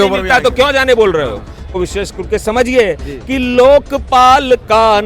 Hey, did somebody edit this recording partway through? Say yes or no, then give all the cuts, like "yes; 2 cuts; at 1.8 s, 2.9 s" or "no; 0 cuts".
yes; 1 cut; at 1.7 s